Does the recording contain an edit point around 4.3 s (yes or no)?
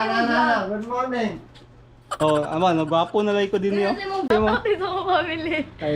yes